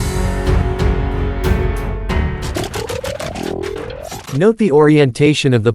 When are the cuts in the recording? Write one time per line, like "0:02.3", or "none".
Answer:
0:00.9
0:02.5
0:04.2